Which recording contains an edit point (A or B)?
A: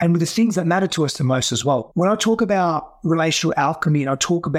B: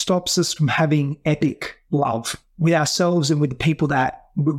A